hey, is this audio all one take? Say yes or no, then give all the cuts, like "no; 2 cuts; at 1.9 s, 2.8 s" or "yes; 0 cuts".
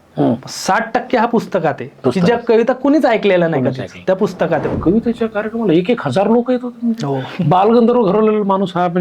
no; 1 cut; at 4.7 s